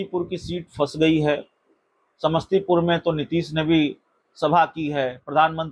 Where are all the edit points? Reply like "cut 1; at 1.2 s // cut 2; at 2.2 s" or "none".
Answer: none

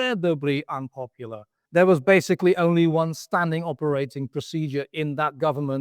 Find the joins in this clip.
cut 1; at 1.5 s

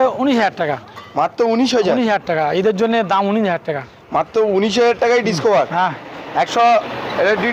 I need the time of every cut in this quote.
none

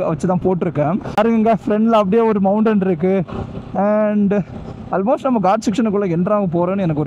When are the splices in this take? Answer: cut 1; at 1.1 s

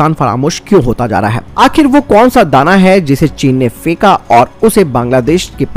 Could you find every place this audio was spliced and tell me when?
cut 1; at 1.4 s

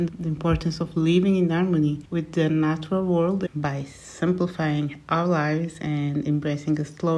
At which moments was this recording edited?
cut 1; at 2.0 s // cut 2; at 3.4 s

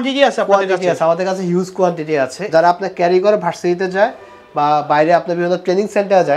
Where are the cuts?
cut 1; at 2.4 s

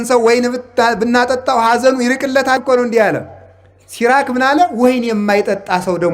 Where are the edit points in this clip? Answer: cut 1; at 2.6 s

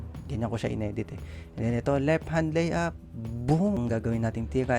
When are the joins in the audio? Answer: cut 1; at 3.8 s

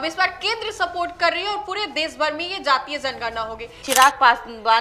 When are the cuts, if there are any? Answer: cut 1; at 3.7 s

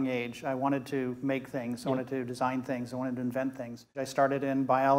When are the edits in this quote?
cut 1; at 4.0 s

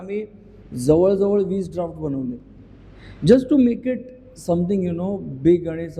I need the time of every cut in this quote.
none

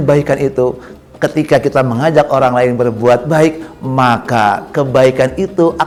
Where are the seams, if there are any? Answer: none

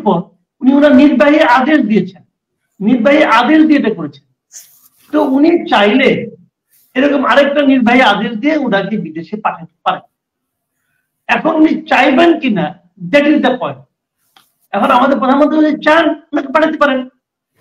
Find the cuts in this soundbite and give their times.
none

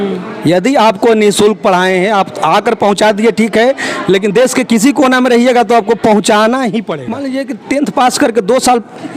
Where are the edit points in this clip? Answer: cut 1; at 7.2 s

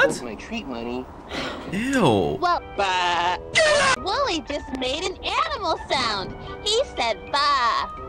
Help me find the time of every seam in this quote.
cut 1; at 2.7 s

